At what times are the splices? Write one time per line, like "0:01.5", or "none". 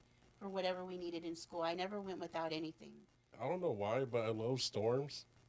0:03.3